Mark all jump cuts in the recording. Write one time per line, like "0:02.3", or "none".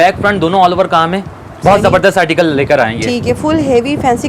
none